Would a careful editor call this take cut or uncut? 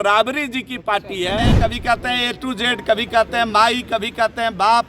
cut